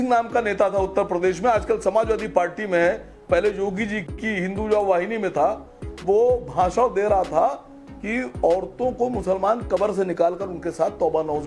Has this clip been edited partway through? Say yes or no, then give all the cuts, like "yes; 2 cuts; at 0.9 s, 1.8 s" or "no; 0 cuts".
no; 0 cuts